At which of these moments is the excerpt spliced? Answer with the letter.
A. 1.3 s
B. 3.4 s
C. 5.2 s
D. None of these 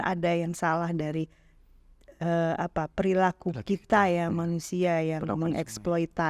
D